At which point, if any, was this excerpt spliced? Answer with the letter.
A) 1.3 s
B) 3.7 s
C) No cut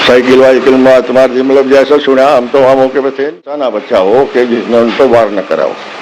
B